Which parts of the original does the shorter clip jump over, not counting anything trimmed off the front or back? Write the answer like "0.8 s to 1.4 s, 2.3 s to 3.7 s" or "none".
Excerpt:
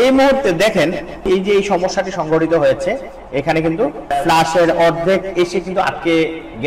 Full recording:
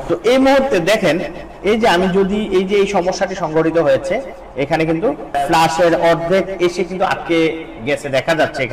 1.5 s to 2.4 s